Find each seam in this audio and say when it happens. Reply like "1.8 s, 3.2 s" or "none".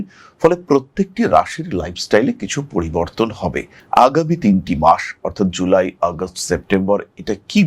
none